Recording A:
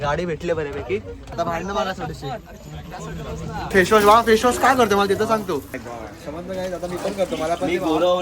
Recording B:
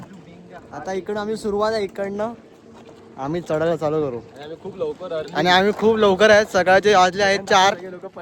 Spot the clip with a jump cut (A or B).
A